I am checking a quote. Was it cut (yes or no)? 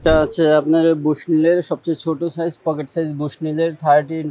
no